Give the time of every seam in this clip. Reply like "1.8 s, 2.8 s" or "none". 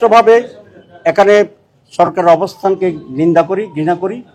none